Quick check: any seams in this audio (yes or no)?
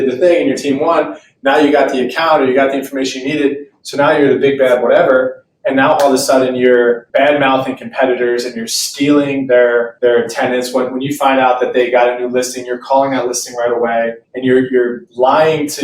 yes